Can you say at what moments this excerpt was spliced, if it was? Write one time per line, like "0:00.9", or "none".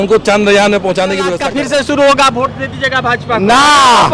0:01.4